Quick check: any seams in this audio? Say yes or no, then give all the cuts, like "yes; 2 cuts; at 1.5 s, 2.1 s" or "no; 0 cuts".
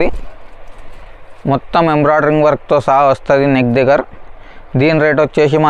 no; 0 cuts